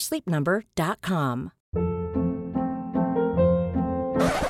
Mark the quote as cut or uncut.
cut